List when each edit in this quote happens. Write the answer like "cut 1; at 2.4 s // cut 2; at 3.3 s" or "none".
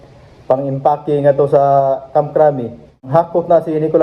cut 1; at 3.1 s